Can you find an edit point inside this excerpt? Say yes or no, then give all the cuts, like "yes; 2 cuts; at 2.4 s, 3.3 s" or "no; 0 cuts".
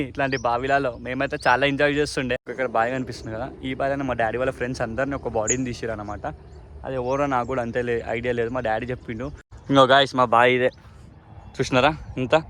yes; 2 cuts; at 2.5 s, 9.5 s